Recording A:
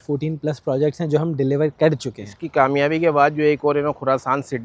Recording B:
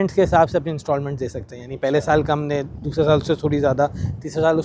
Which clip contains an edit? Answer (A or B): A